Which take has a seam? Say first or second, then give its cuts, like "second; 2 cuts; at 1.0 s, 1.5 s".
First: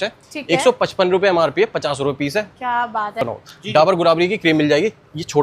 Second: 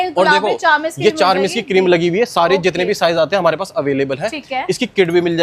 first; 1 cut; at 3.1 s